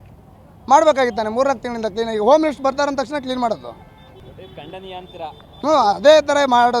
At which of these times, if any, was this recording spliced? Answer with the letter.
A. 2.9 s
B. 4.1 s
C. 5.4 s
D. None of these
B